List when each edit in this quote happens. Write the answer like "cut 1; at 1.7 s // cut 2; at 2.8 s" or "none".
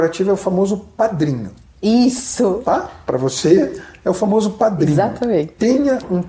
none